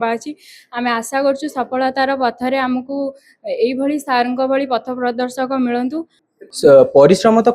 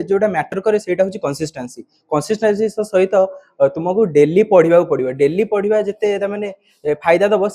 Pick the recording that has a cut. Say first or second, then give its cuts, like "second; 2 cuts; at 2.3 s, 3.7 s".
first; 1 cut; at 6.1 s